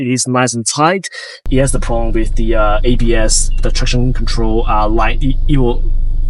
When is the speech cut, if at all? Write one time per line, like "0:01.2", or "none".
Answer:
0:01.5